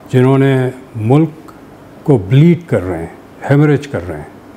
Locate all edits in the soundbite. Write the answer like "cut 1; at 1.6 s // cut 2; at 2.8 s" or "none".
none